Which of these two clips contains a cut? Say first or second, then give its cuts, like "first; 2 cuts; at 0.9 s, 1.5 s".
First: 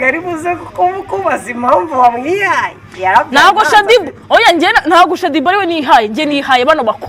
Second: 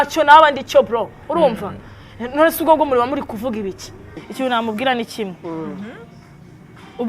second; 1 cut; at 4.3 s